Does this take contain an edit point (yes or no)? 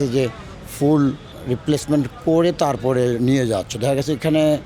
yes